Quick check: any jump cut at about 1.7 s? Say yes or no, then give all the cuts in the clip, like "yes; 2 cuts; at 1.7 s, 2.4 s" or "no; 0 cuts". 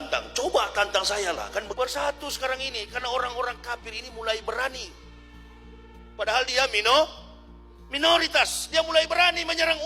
yes; 1 cut; at 1.7 s